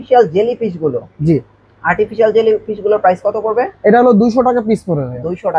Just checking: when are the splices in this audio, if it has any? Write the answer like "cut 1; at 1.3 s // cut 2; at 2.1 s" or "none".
none